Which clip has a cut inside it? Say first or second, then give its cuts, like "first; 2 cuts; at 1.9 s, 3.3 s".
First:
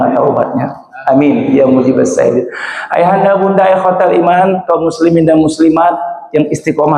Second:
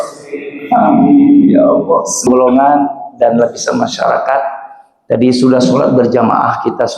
second; 1 cut; at 2.3 s